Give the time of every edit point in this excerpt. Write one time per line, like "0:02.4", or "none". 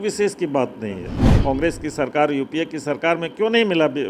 0:01.2